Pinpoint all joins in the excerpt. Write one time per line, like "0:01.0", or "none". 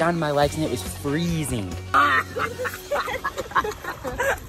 0:01.8